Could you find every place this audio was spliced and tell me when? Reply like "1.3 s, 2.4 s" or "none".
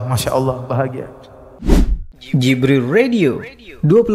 1.5 s